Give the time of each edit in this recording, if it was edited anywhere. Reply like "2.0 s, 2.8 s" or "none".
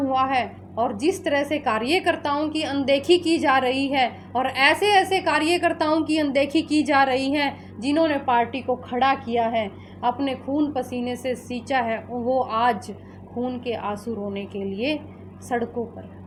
none

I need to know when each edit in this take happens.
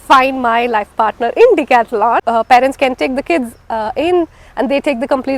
2.2 s

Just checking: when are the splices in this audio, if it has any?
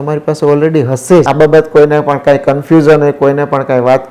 1.3 s

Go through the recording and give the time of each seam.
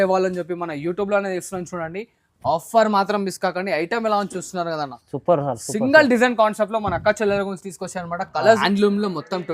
8.6 s

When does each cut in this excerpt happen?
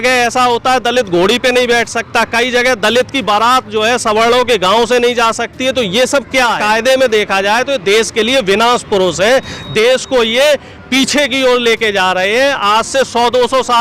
6.6 s

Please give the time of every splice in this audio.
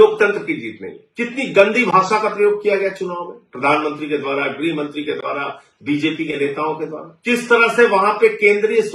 1.0 s, 6.6 s

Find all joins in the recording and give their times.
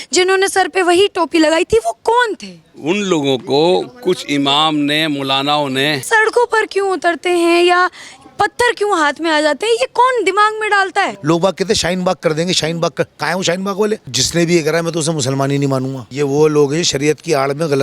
6.0 s, 11.2 s, 14.2 s, 16.0 s

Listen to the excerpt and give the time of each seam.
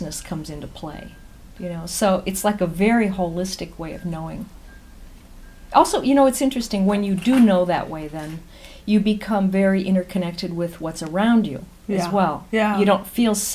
4.9 s

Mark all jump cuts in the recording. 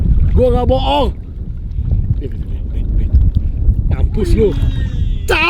none

